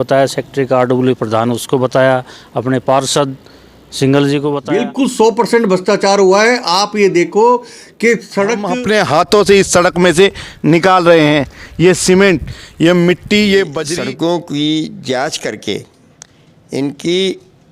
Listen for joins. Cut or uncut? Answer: cut